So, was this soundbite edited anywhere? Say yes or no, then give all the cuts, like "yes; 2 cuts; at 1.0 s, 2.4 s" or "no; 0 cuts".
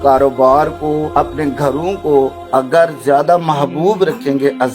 yes; 2 cuts; at 1.1 s, 2.4 s